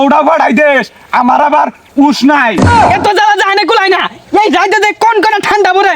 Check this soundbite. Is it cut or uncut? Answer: cut